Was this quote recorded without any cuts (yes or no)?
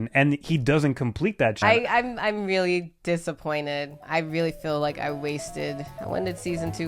no